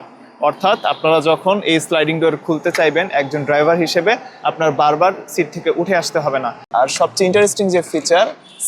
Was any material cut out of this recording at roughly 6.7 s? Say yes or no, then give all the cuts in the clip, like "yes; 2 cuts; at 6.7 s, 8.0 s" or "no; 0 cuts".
yes; 1 cut; at 6.7 s